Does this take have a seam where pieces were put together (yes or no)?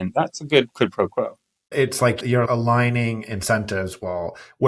yes